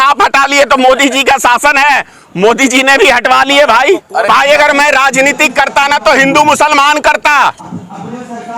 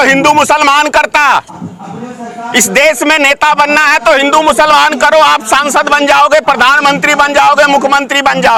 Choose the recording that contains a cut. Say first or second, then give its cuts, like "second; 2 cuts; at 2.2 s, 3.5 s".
first; 1 cut; at 4.3 s